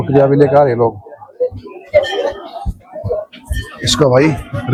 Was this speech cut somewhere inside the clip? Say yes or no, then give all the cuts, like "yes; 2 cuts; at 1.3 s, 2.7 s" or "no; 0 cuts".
no; 0 cuts